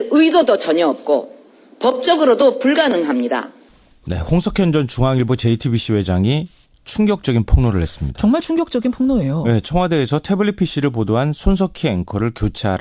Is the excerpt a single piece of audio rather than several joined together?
yes; 0 cuts

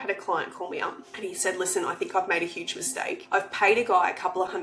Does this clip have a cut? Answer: yes; 2 cuts; at 1.1 s, 3.2 s

